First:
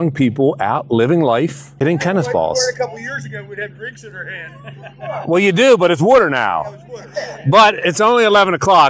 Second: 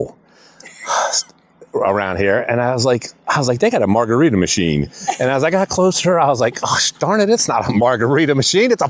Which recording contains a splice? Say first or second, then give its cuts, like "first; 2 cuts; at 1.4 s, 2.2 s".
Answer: first; 1 cut; at 1.6 s